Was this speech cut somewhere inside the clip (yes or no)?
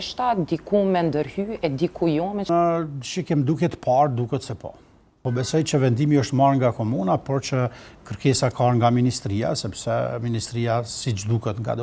yes